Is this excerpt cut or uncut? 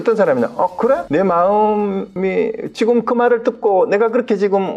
cut